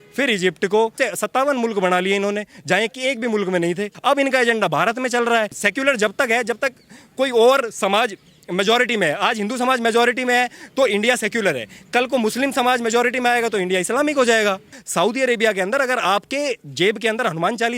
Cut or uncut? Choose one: cut